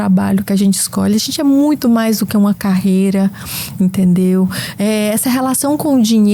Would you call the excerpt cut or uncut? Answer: uncut